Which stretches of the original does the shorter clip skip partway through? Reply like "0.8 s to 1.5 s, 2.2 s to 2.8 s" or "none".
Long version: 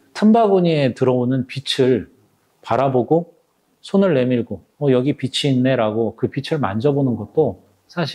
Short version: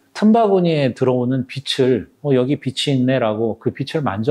2.1 s to 4.7 s